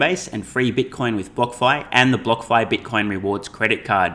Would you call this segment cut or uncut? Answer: uncut